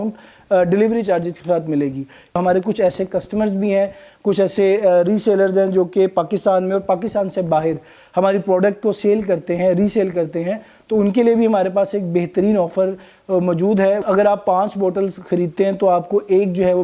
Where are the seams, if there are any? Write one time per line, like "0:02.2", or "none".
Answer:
0:14.0